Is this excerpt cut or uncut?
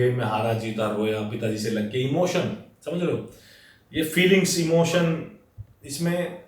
uncut